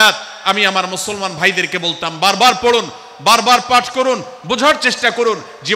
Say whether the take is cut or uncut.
uncut